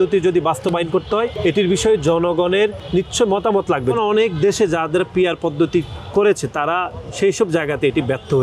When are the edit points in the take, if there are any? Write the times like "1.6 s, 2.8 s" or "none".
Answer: 1.3 s, 2.8 s, 4.0 s